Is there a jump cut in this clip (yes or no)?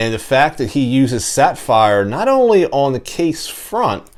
no